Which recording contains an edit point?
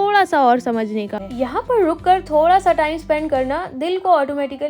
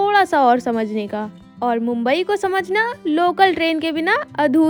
first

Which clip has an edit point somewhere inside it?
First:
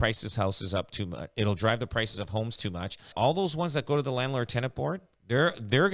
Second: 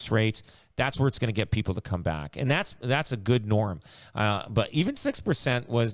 first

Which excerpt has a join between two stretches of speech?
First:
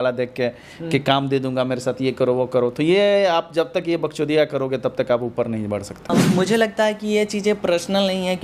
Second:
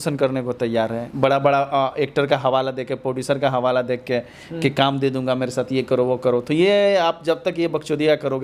first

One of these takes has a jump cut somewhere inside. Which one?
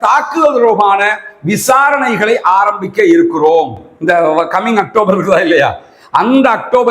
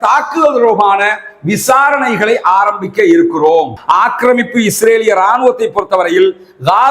second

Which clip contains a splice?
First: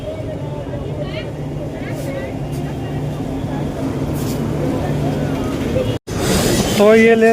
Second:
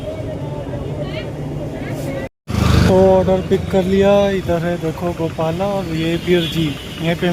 second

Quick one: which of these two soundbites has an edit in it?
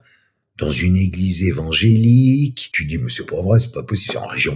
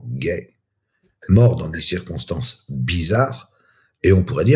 first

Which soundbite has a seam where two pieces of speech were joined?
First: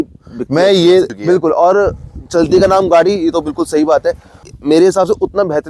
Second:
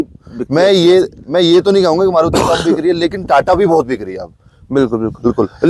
first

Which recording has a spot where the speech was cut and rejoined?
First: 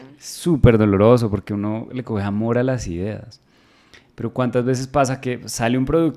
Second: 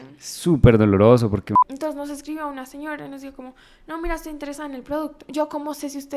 second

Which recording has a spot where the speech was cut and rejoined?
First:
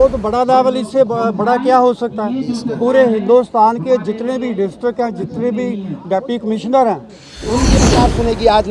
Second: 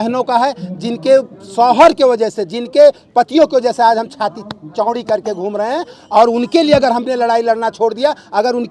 first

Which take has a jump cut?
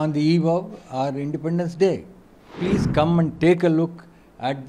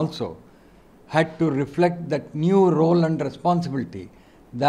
first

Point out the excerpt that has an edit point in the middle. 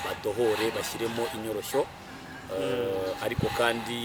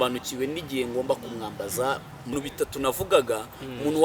second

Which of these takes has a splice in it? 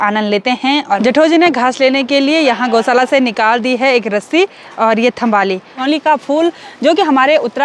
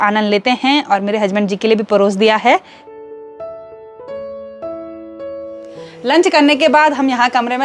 first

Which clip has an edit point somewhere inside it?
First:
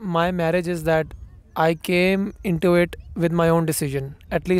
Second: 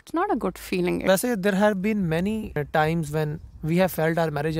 second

